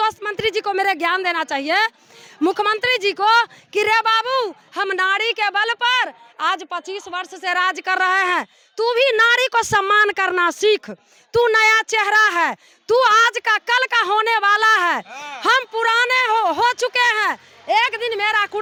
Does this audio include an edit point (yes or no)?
no